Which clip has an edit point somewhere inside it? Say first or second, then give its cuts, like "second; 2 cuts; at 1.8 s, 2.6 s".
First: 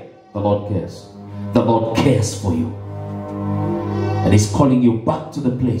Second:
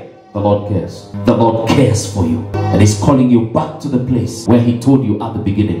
second; 3 cuts; at 1.0 s, 2.6 s, 4.3 s